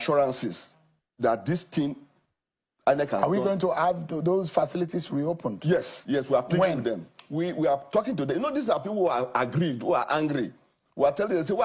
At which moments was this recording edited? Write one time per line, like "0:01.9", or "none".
none